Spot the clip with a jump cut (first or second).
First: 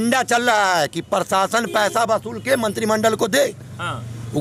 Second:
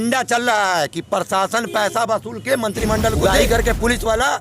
second